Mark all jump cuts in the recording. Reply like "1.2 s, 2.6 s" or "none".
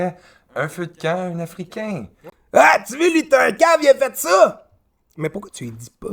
2.2 s